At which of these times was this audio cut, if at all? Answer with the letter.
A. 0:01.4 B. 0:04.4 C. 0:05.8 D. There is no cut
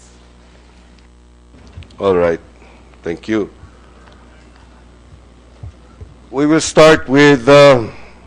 C